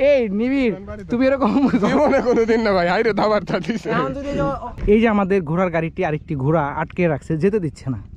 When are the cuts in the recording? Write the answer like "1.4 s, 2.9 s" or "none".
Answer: none